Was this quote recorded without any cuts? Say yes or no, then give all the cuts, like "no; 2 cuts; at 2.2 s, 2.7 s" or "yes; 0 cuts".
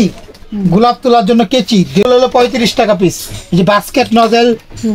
no; 1 cut; at 2.1 s